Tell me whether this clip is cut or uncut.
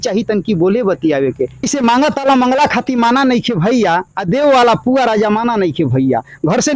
cut